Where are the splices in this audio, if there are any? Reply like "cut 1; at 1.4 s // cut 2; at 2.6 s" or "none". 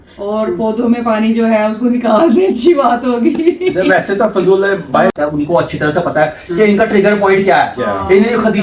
cut 1; at 5.1 s